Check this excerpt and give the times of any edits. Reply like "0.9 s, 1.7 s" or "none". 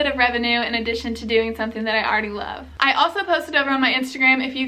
none